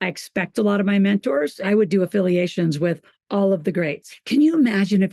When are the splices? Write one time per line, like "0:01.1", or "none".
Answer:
0:01.7
0:04.1